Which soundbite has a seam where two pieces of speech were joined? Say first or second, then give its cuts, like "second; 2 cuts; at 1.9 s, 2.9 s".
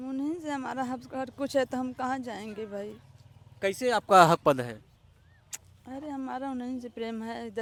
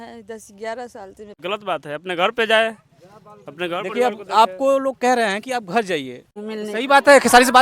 second; 2 cuts; at 1.4 s, 6.4 s